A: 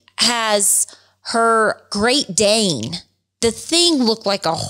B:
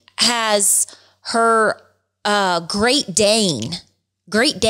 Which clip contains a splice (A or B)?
A